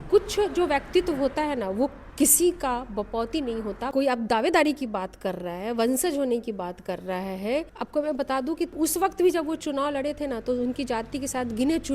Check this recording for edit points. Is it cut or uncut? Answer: cut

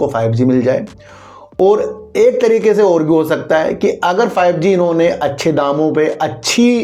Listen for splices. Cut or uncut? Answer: uncut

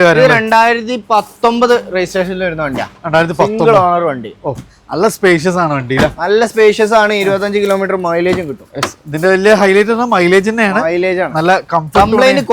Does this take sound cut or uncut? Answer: uncut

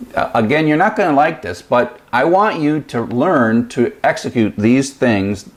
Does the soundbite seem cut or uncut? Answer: uncut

